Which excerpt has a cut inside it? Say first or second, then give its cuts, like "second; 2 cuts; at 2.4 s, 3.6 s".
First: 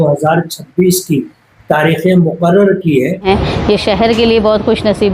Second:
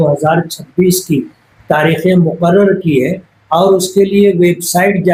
first; 1 cut; at 3.2 s